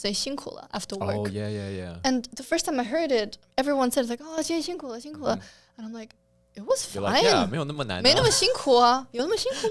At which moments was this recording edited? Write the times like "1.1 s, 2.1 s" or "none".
none